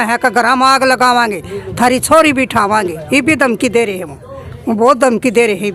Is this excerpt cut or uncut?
uncut